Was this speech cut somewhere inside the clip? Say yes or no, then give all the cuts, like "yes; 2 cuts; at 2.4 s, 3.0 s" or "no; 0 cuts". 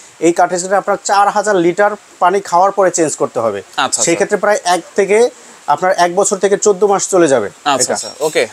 no; 0 cuts